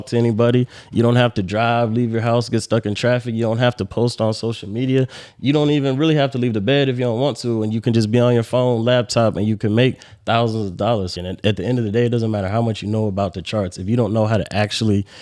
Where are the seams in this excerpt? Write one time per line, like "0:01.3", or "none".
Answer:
0:11.1